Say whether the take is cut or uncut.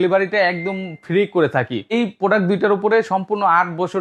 cut